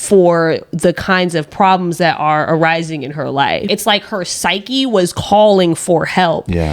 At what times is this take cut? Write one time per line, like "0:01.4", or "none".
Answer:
0:03.6